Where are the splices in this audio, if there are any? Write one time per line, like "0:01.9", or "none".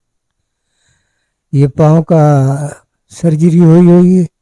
none